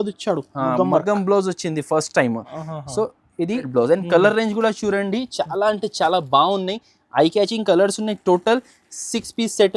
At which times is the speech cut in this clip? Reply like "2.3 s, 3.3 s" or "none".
3.7 s